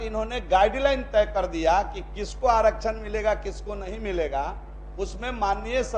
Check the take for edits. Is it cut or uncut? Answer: uncut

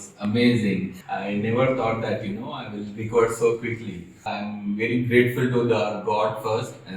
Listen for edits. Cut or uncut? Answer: cut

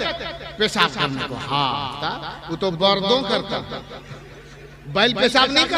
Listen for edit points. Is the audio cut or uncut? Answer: uncut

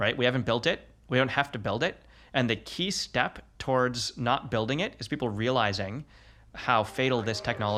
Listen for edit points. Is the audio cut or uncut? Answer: uncut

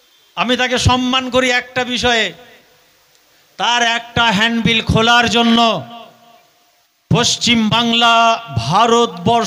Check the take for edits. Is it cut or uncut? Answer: uncut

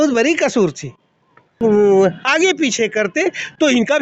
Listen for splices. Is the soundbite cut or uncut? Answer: cut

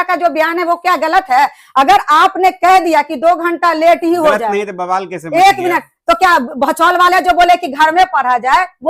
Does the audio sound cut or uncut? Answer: uncut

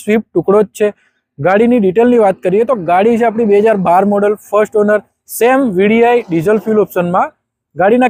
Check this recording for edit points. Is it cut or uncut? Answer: uncut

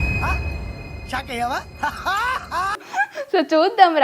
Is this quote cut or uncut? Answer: uncut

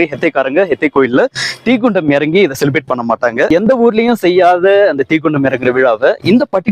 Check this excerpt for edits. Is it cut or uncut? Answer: cut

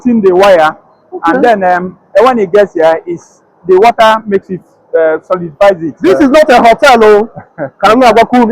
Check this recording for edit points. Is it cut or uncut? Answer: cut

